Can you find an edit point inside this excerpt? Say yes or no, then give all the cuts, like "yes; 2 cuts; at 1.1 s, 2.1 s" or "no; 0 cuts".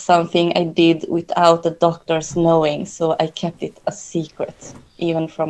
no; 0 cuts